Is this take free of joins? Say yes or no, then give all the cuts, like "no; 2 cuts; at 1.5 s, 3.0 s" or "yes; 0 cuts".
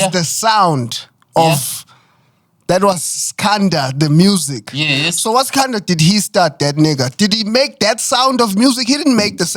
yes; 0 cuts